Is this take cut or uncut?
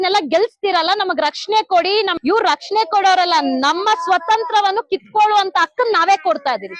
cut